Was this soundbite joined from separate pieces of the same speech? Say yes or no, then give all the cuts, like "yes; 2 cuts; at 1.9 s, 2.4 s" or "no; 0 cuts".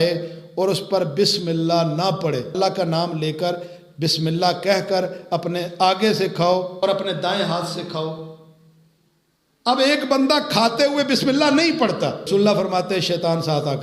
yes; 3 cuts; at 2.5 s, 6.8 s, 12.3 s